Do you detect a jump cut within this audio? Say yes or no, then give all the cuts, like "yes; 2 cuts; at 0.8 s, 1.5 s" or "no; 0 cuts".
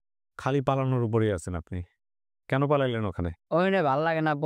no; 0 cuts